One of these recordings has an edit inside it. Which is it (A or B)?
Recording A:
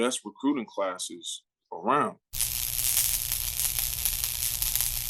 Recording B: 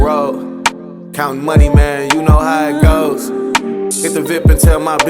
A